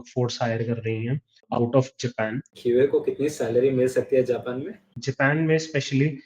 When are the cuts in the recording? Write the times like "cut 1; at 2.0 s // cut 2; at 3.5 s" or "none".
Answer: cut 1; at 1.4 s // cut 2; at 2.5 s // cut 3; at 5.0 s